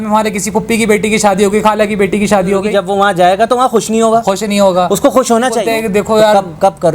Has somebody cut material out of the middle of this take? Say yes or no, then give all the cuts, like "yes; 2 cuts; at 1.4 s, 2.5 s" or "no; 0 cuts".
yes; 2 cuts; at 2.7 s, 5.6 s